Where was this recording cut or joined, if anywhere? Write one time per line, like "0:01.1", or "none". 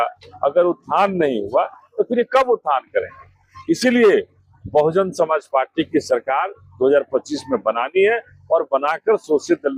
none